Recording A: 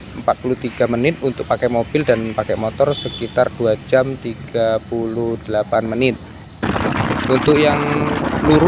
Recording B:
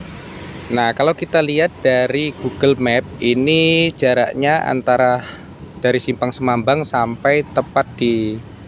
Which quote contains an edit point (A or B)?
A